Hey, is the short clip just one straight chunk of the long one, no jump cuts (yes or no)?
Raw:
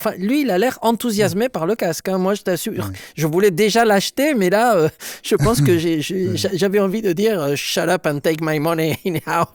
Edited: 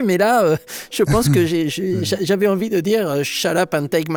yes